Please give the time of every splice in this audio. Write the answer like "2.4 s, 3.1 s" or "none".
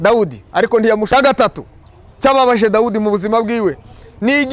1.1 s